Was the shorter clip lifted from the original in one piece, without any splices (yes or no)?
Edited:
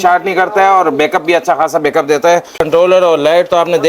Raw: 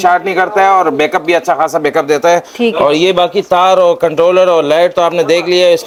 no